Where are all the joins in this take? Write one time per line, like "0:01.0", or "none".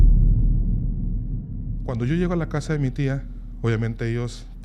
0:01.8